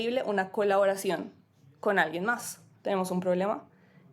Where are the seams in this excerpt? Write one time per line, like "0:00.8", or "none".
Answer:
0:02.7